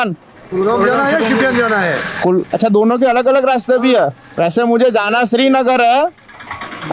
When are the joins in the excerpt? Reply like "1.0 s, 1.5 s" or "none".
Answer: none